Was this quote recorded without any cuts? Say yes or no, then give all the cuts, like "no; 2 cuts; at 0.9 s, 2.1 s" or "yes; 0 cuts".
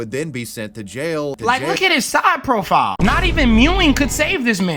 no; 1 cut; at 1.4 s